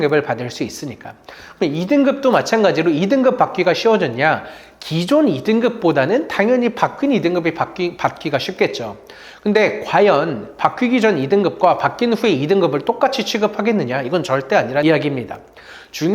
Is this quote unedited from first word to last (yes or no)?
no